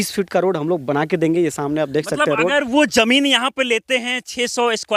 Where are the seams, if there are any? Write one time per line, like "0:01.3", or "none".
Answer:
none